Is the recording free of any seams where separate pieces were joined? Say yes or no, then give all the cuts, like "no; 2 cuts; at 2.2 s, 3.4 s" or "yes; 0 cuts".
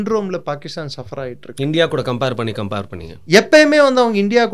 yes; 0 cuts